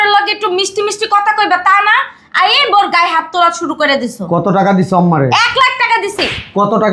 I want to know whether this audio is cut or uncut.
uncut